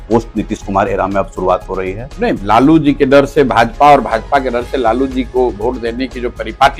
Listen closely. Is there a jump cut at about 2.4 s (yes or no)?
yes